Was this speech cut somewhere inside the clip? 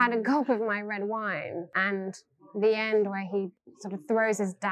yes; 1 cut; at 1.7 s

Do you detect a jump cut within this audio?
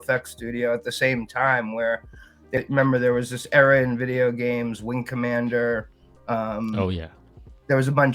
yes; 1 cut; at 2.6 s

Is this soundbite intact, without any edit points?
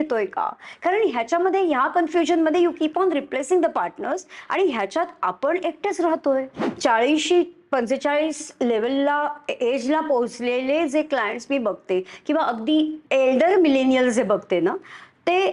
no; 2 cuts; at 6.6 s, 13.0 s

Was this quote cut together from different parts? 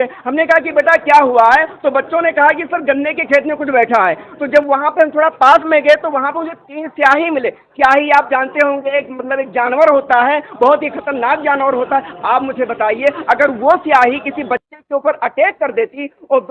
no; 0 cuts

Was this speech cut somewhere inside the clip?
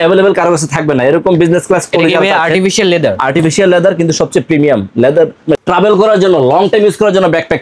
yes; 1 cut; at 5.6 s

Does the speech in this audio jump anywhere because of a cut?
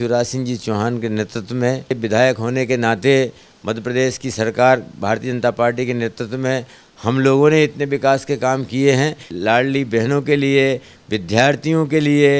yes; 2 cuts; at 2.0 s, 9.3 s

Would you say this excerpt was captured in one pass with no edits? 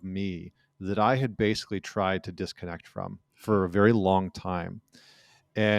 yes; 0 cuts

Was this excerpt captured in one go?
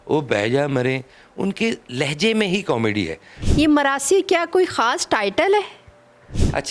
no; 1 cut; at 3.3 s

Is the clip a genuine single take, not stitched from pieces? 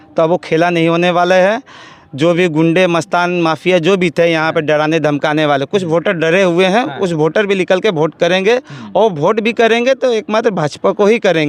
yes; 0 cuts

